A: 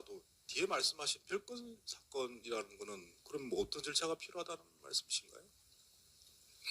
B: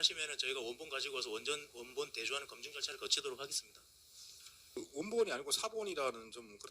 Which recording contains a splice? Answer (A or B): B